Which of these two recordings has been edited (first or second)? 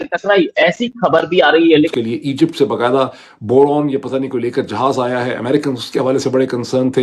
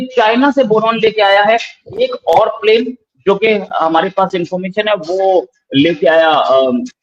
first